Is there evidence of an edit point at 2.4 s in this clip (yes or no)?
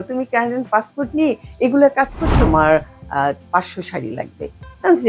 yes